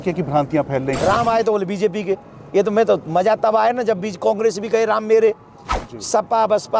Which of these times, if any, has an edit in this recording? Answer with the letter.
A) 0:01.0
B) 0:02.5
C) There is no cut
A